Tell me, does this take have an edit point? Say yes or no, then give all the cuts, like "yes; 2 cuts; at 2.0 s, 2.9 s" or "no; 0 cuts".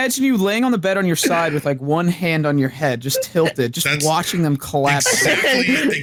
no; 0 cuts